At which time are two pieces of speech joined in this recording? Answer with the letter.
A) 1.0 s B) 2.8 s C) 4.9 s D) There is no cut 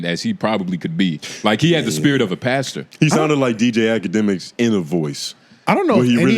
D